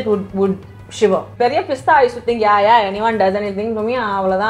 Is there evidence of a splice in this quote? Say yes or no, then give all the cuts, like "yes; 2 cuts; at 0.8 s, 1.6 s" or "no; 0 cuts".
yes; 1 cut; at 1.3 s